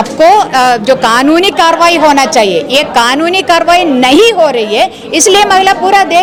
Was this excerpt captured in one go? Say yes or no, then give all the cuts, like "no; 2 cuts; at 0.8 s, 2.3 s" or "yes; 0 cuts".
yes; 0 cuts